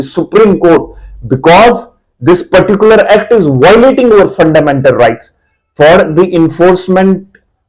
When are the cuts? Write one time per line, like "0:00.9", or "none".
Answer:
none